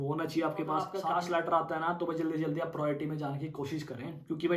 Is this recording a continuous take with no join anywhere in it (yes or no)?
no